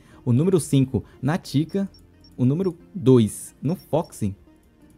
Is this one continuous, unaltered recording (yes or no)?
yes